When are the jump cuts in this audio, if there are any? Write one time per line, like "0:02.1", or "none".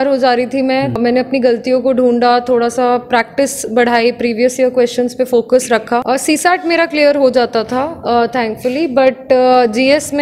0:01.0
0:06.0

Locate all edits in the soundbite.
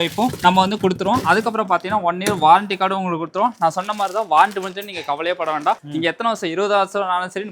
none

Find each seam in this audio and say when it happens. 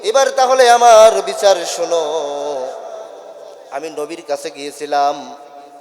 none

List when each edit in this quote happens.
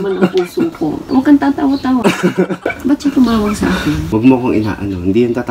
0:01.0
0:04.0

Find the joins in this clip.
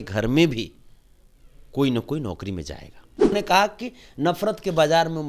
0:03.3

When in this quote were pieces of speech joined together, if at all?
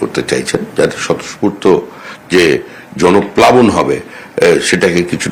none

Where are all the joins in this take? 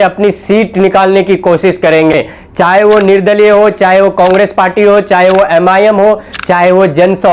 none

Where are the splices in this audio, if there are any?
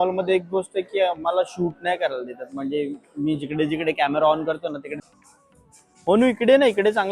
0:05.0

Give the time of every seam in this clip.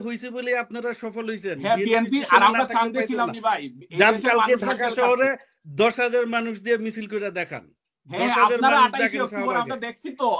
none

